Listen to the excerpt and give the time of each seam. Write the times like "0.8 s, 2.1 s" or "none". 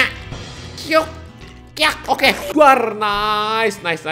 2.5 s